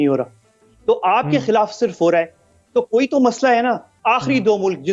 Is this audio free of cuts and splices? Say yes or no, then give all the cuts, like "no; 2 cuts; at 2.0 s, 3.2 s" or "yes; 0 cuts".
no; 1 cut; at 3.9 s